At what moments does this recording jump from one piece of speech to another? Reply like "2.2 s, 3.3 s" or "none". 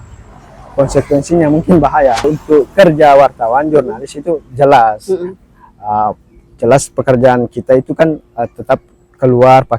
2.2 s